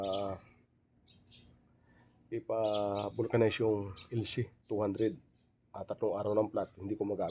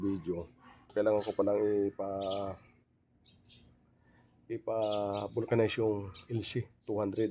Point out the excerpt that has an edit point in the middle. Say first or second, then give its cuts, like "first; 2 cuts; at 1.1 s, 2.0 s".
second; 1 cut; at 0.9 s